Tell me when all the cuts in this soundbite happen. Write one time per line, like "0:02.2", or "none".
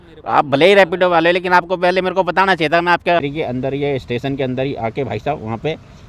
0:03.2